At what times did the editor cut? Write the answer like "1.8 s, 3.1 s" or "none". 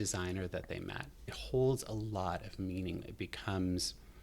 1.4 s, 3.1 s